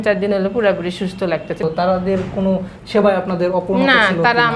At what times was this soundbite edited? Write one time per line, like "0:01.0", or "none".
0:01.6